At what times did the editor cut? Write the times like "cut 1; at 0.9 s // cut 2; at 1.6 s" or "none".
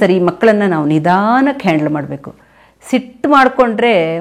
none